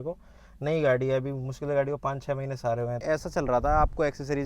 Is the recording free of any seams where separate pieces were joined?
no; 1 cut; at 3.0 s

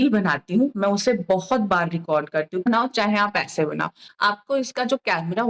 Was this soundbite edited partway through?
yes; 1 cut; at 2.7 s

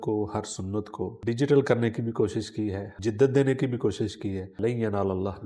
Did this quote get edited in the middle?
yes; 3 cuts; at 1.2 s, 2.9 s, 4.5 s

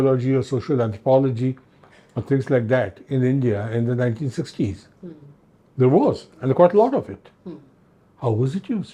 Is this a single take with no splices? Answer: yes; 0 cuts

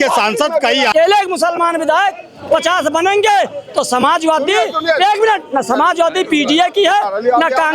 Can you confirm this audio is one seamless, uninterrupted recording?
no; 1 cut; at 0.9 s

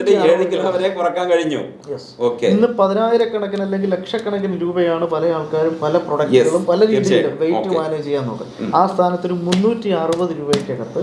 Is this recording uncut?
yes; 0 cuts

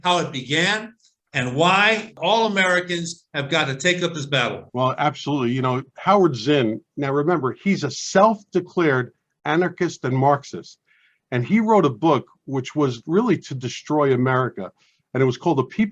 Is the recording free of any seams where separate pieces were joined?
no; 2 cuts; at 2.1 s, 4.6 s

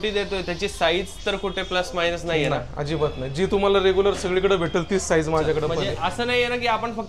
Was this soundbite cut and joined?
yes; 1 cut; at 5.8 s

